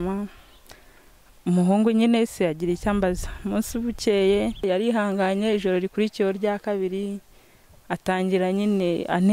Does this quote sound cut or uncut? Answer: cut